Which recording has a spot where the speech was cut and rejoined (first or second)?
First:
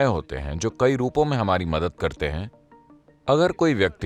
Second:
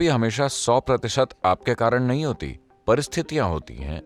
first